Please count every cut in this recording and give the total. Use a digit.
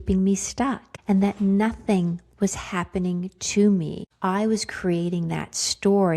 2